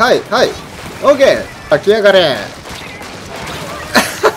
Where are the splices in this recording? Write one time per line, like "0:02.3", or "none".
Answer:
0:01.7